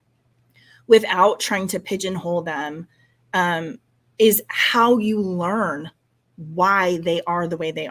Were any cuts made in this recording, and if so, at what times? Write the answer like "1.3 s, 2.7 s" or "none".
none